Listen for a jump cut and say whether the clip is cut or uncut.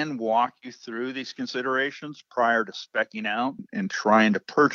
uncut